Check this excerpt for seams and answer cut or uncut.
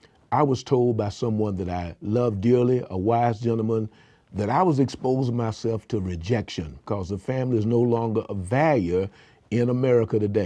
cut